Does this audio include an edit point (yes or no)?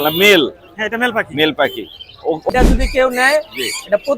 yes